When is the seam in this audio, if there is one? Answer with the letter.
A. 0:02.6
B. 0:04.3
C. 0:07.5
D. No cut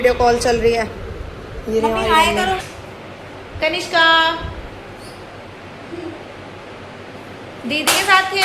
A